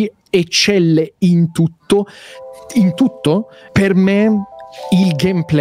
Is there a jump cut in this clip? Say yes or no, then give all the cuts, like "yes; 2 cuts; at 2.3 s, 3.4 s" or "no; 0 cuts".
yes; 1 cut; at 3.7 s